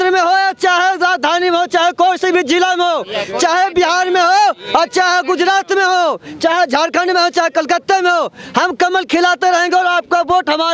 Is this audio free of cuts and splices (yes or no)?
yes